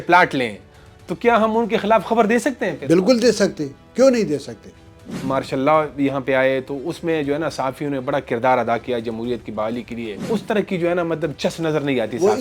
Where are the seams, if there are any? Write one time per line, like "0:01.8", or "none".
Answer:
0:05.1
0:10.2